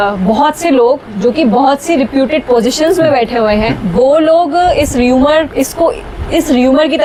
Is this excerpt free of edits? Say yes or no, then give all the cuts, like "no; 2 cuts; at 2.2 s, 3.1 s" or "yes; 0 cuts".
yes; 0 cuts